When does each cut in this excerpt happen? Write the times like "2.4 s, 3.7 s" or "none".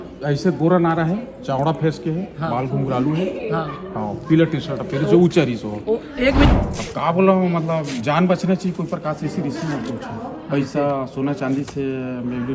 6.5 s